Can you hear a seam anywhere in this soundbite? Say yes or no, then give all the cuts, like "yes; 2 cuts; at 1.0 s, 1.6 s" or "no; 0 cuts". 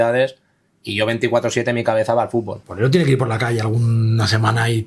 yes; 1 cut; at 2.6 s